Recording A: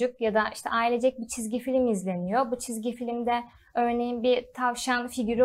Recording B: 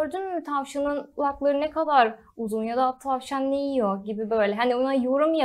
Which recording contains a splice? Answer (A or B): B